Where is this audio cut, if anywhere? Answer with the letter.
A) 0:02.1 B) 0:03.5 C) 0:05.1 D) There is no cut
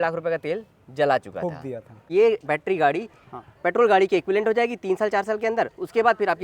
A